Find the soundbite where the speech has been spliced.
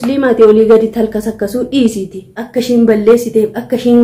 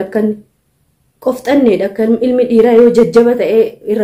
first; 1 cut; at 2.4 s

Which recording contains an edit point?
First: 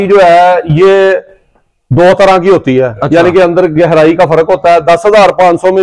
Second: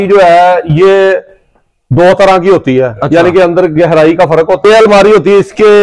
second; 1 cut; at 4.6 s

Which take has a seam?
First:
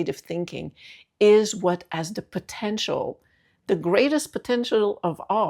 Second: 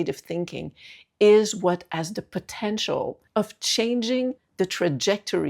second; 2 cuts; at 3.2 s, 4.4 s

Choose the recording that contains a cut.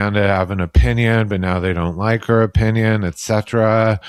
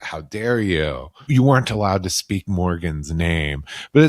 second; 1 cut; at 1.2 s

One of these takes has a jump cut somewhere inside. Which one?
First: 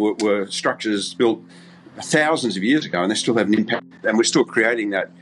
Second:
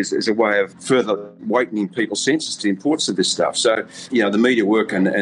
second; 2 cuts; at 0.9 s, 3.9 s

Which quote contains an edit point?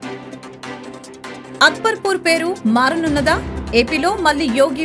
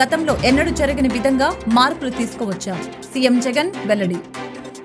first; 1 cut; at 1.4 s

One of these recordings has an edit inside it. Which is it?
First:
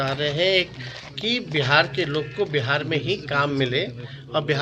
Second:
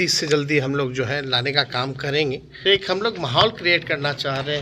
second; 1 cut; at 2.7 s

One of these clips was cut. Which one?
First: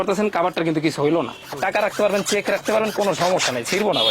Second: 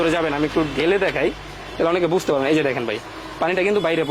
first; 1 cut; at 1.4 s

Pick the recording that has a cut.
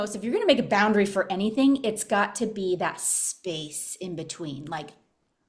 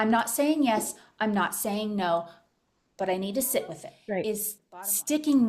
second; 1 cut; at 3.9 s

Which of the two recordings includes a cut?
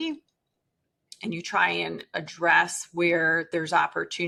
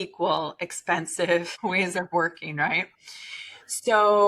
second; 1 cut; at 1.5 s

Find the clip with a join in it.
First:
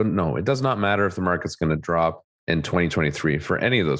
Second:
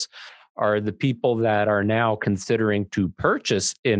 first; 1 cut; at 2.3 s

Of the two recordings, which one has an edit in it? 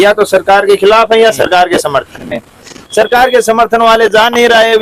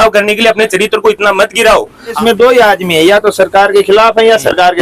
second; 1 cut; at 2.2 s

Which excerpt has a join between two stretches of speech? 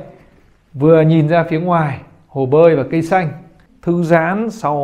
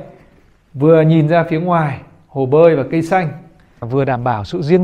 second; 1 cut; at 3.8 s

